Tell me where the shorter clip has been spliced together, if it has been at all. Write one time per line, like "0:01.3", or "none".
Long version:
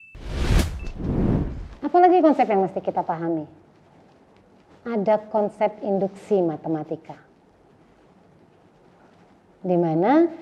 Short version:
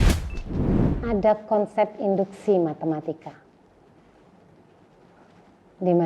0:01.0